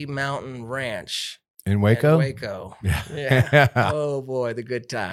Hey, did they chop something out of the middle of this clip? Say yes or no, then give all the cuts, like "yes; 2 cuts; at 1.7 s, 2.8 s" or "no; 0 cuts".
no; 0 cuts